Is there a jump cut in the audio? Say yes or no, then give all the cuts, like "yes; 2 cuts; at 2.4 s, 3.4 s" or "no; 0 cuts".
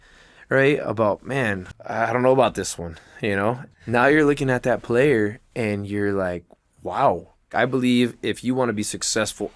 yes; 3 cuts; at 1.7 s, 3.7 s, 7.5 s